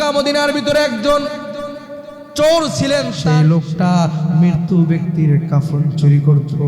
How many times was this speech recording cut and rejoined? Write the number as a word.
one